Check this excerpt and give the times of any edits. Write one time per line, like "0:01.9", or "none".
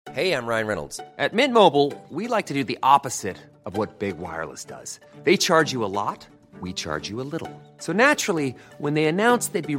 none

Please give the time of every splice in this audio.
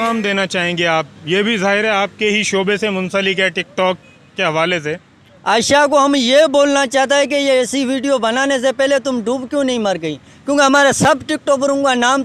none

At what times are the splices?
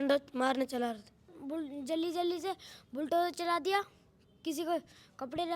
0:01.4

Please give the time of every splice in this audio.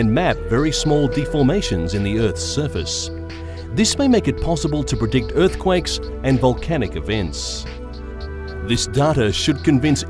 none

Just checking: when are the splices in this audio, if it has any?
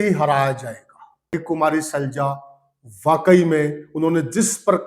0:01.4

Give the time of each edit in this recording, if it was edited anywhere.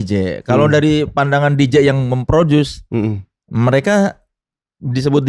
none

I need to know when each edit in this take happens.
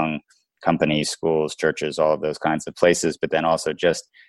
none

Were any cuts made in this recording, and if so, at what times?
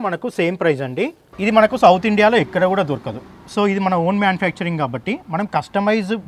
0:01.2

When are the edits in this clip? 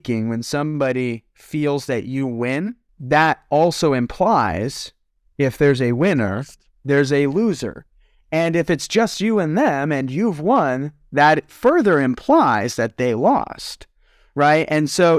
0:02.9

